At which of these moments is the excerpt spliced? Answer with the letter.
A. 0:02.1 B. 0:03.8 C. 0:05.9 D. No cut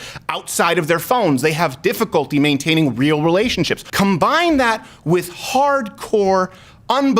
B